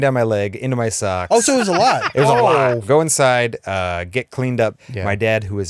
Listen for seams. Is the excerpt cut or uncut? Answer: cut